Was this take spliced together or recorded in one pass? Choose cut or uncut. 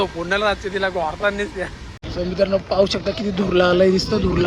cut